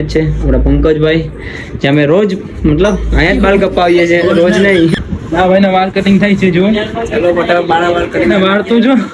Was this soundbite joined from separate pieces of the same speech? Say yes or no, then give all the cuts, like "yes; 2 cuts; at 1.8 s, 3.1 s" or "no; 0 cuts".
yes; 1 cut; at 4.9 s